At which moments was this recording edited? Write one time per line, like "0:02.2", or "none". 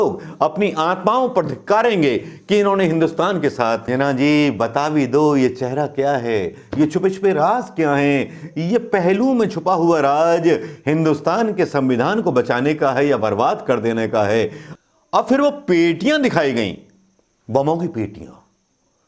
0:03.8
0:14.6